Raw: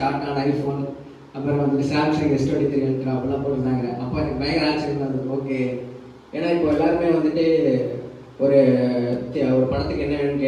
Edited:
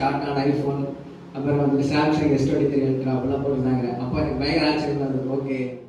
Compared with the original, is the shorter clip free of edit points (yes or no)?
yes